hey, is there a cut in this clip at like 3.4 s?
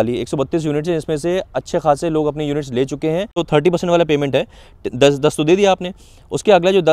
yes; 1 cut; at 3.4 s

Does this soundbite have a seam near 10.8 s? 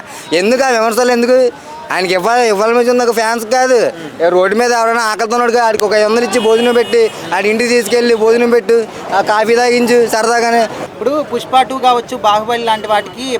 yes; 1 cut; at 10.8 s

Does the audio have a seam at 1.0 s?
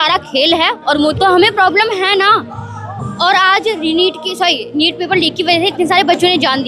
yes; 1 cut; at 1.0 s

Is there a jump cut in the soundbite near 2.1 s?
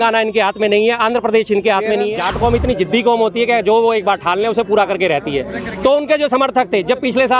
yes; 1 cut; at 2.1 s

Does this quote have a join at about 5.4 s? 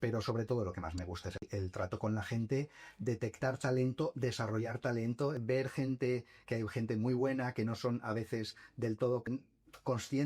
yes; 3 cuts; at 1.4 s, 5.4 s, 9.2 s

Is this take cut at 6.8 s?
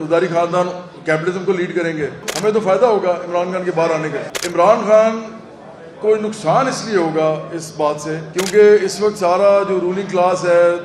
no; 3 cuts; at 2.2 s, 4.3 s, 8.2 s

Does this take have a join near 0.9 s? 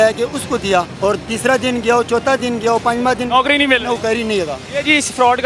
yes; 1 cut; at 0.9 s

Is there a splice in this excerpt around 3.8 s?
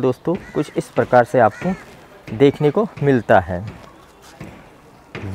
no; 0 cuts

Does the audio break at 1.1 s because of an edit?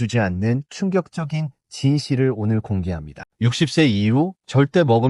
no; 1 cut; at 3.3 s

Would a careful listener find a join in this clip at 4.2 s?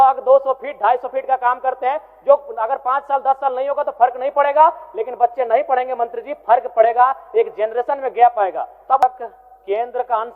no; 1 cut; at 9.0 s

